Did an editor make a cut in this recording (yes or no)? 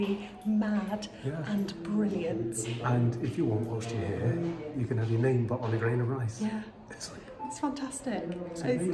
no